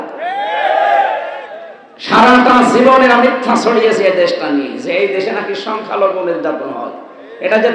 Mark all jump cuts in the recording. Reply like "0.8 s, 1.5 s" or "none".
none